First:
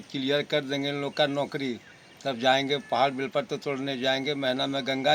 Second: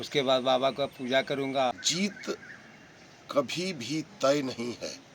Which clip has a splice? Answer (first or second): second